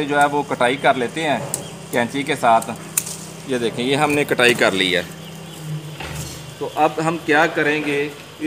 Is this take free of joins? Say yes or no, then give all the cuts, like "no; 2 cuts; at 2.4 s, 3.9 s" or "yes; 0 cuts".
yes; 0 cuts